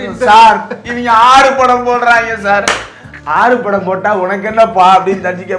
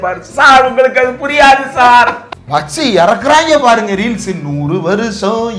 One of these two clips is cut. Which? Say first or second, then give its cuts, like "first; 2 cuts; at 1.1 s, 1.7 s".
second; 1 cut; at 2.3 s